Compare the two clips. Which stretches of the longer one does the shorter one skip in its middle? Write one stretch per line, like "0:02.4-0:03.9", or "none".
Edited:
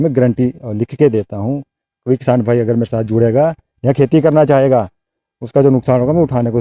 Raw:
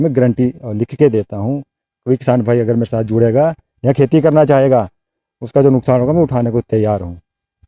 none